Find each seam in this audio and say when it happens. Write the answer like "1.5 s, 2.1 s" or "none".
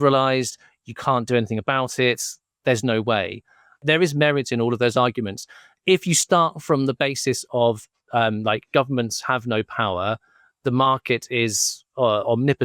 3.8 s